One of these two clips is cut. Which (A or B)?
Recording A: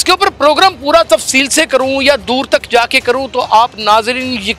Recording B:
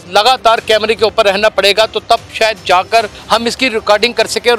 B